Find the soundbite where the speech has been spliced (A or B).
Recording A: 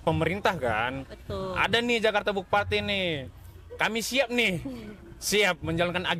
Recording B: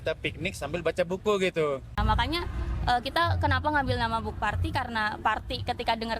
B